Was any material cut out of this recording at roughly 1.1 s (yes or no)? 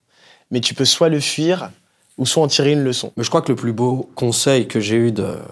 no